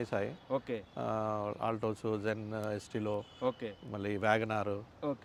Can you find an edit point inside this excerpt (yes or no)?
no